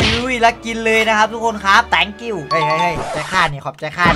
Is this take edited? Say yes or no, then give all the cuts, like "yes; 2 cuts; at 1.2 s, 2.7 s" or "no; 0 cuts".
yes; 1 cut; at 1.9 s